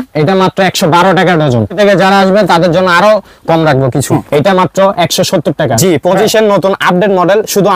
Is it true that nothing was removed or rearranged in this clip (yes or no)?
no